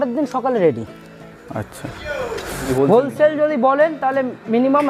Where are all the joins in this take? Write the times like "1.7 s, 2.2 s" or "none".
2.6 s